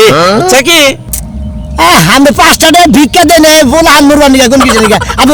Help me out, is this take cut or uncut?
uncut